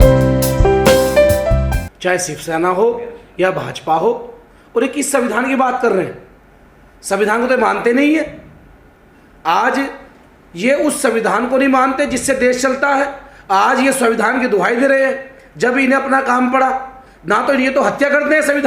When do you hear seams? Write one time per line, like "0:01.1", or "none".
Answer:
0:01.7